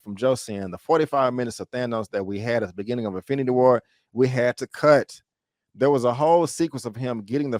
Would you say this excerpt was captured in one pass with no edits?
yes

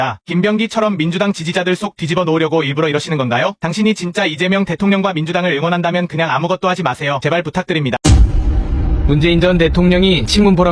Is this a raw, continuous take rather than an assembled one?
no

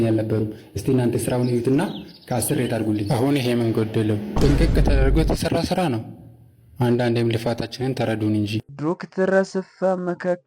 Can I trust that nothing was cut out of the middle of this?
no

